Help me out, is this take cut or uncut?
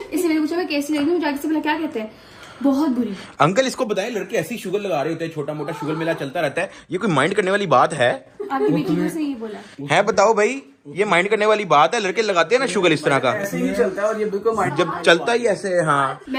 uncut